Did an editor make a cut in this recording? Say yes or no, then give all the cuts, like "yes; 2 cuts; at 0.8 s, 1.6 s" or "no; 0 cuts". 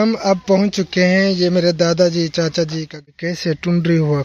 yes; 1 cut; at 3.0 s